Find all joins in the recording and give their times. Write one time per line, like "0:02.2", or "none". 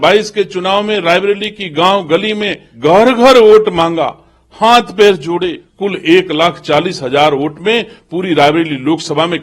0:02.6
0:05.6